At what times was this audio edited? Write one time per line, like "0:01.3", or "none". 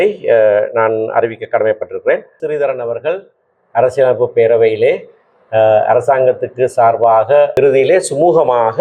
0:02.4
0:07.5

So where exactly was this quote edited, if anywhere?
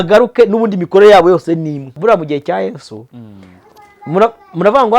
0:02.0

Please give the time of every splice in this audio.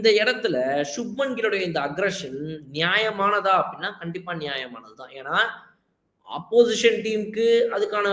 none

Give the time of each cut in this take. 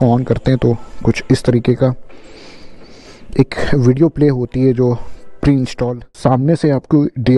0:06.1

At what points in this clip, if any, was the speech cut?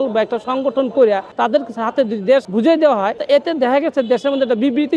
0:01.3
0:02.5
0:03.2

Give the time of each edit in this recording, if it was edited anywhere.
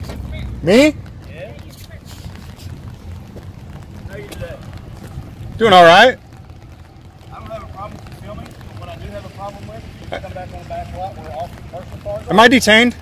none

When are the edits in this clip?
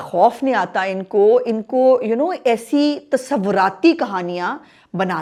none

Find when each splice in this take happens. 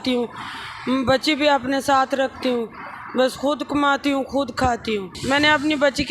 0:05.2

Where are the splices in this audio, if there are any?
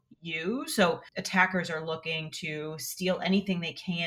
0:01.1

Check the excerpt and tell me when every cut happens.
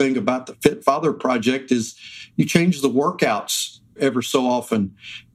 0:04.0

